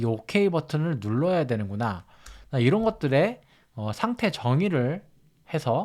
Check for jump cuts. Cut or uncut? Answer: uncut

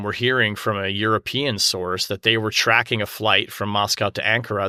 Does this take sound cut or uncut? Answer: uncut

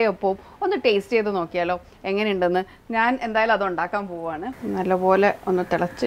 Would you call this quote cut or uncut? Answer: cut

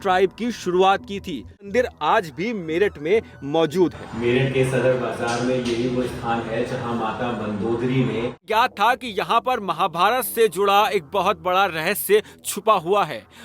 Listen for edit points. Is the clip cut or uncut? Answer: cut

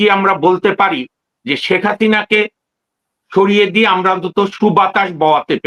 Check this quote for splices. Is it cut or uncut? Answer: uncut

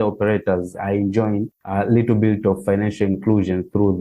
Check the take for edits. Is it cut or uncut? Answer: cut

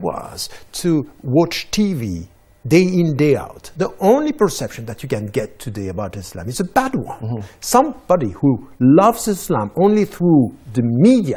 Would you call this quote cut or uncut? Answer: uncut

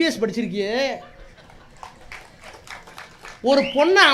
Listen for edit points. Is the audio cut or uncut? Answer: uncut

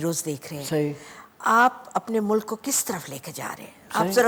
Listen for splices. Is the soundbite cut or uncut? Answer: uncut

